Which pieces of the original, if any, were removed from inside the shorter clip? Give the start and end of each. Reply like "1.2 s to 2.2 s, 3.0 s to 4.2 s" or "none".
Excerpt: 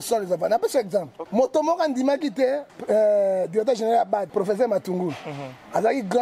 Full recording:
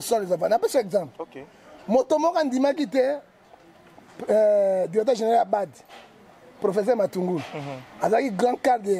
1.2 s to 1.7 s, 3.3 s to 4.1 s, 5.7 s to 6.6 s